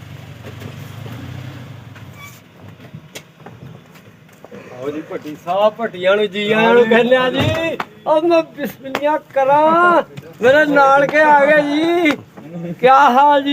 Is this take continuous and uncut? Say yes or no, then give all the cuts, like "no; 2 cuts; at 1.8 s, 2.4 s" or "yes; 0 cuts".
yes; 0 cuts